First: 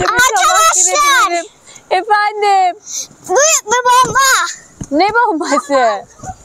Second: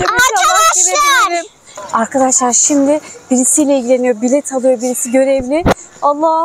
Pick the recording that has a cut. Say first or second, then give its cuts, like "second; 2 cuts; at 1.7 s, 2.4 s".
second; 1 cut; at 1.8 s